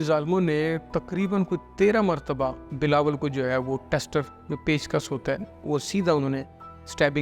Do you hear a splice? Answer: yes; 2 cuts; at 2.6 s, 5.6 s

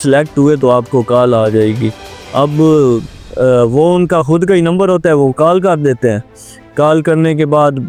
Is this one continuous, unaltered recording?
yes; 0 cuts

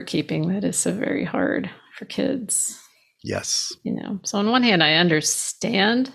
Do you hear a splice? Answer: no; 0 cuts

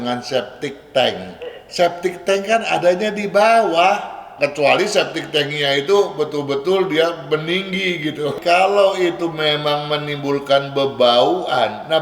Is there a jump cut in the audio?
yes; 2 cuts; at 4.2 s, 8.3 s

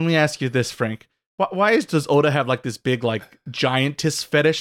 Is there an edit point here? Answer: no; 0 cuts

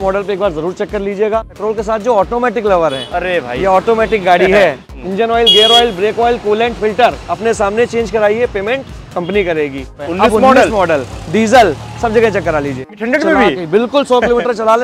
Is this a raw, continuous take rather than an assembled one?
no; 4 cuts; at 1.5 s, 4.9 s, 9.9 s, 13.0 s

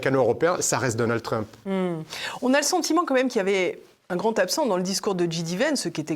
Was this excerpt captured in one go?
yes; 0 cuts

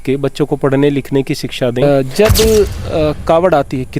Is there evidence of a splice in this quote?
yes; 1 cut; at 1.8 s

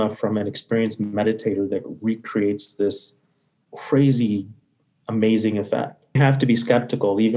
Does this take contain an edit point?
yes; 1 cut; at 6.2 s

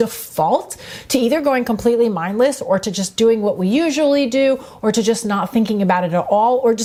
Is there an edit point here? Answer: no; 0 cuts

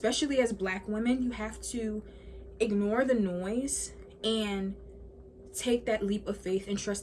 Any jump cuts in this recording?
no; 0 cuts

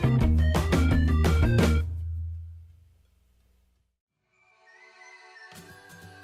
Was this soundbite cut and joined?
no; 0 cuts

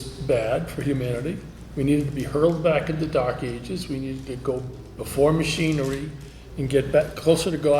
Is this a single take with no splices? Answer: yes; 0 cuts

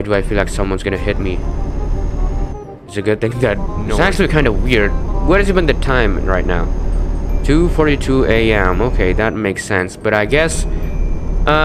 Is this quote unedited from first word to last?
no; 1 cut; at 3.8 s

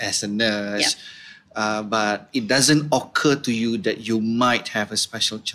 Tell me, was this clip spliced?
no; 0 cuts

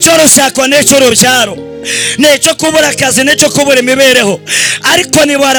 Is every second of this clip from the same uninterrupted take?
yes; 0 cuts

